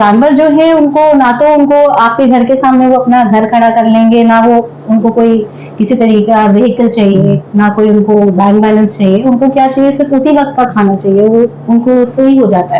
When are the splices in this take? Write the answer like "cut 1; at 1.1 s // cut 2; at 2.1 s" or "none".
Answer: none